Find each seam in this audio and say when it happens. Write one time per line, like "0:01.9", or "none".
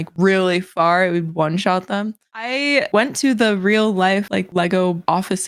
0:02.5